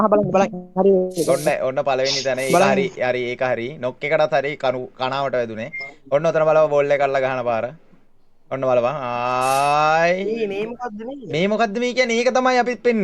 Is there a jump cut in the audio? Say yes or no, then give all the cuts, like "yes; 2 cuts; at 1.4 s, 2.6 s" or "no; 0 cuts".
no; 0 cuts